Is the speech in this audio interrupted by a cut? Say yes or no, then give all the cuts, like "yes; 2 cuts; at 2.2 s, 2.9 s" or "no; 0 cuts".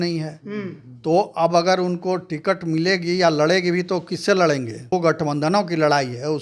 yes; 1 cut; at 4.9 s